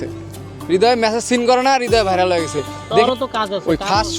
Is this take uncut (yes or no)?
no